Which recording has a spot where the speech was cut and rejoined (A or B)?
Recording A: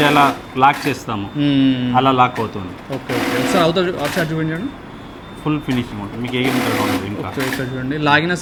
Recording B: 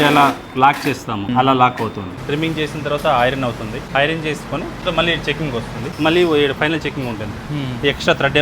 B